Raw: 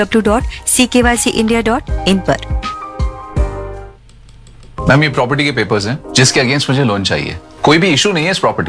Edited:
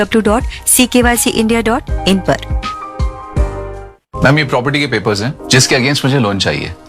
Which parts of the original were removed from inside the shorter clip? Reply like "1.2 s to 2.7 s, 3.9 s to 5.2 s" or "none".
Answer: 4.0 s to 4.6 s